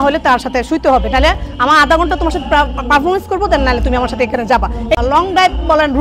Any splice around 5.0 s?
yes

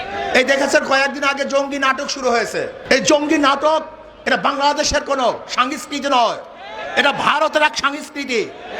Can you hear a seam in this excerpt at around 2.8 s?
yes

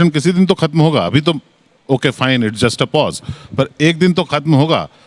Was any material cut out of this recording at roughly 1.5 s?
no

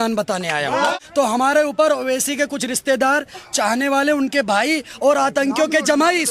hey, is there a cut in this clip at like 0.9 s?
yes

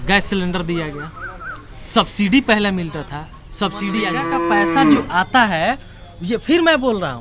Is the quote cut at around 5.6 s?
no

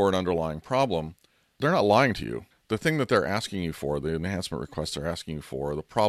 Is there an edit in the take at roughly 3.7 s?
no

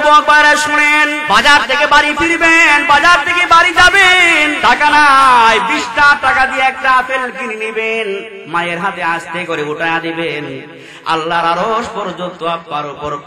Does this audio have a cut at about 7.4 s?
no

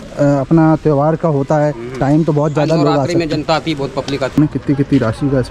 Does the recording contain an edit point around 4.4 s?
yes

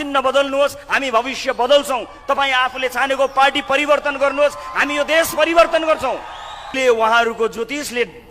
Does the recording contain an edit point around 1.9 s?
no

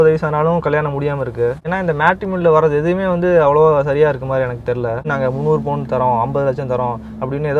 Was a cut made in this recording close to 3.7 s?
no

